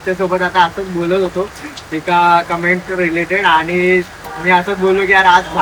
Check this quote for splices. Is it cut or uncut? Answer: uncut